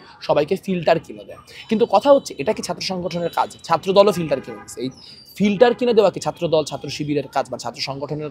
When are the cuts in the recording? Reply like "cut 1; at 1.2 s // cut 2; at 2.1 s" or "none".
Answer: none